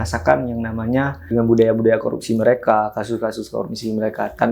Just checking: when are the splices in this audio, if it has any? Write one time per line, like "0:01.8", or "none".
0:01.2